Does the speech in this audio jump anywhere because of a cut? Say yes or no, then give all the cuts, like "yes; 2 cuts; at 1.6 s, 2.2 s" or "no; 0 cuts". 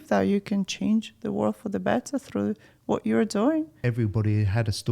yes; 1 cut; at 3.8 s